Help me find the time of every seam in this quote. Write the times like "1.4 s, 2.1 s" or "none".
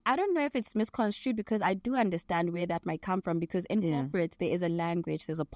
none